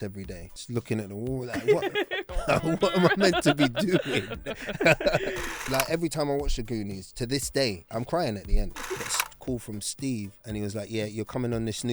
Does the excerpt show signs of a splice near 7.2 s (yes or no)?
no